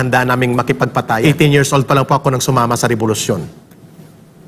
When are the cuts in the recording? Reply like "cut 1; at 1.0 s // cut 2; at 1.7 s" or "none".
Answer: cut 1; at 1.2 s